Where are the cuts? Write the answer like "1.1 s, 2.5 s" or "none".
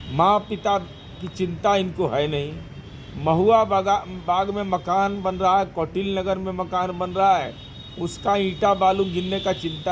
none